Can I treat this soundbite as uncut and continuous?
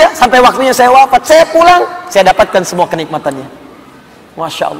yes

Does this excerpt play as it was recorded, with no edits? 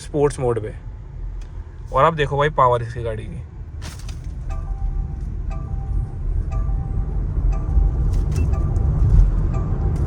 yes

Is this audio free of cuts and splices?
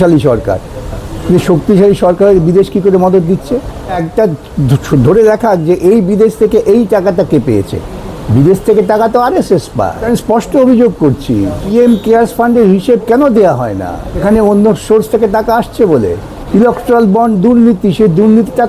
no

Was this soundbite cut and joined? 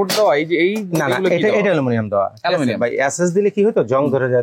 no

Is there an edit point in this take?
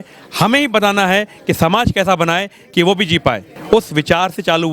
yes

